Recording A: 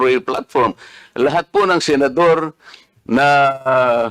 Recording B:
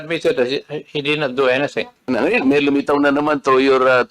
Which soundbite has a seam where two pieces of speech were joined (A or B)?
B